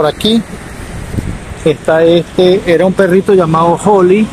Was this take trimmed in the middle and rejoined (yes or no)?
no